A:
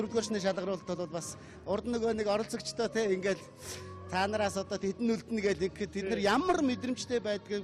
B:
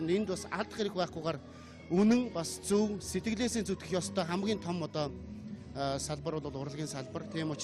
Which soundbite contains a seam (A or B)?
B